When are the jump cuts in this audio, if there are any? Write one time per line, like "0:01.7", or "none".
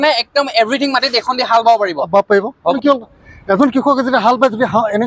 0:02.7